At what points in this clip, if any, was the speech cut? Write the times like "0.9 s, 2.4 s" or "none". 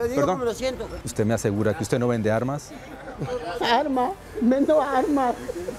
1.0 s